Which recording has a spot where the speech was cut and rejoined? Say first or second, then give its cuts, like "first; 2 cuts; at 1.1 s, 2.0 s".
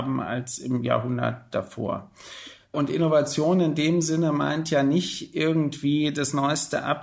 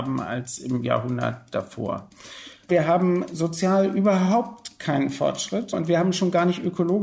second; 2 cuts; at 2.7 s, 5.7 s